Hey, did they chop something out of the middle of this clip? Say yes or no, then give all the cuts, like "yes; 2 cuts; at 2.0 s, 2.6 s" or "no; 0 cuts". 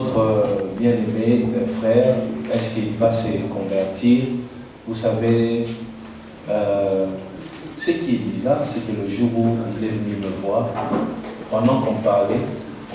no; 0 cuts